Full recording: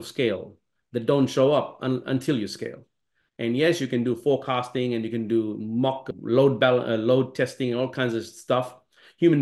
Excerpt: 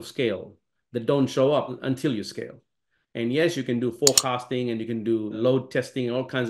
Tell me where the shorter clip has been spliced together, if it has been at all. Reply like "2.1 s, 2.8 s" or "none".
1.8 s, 5.4 s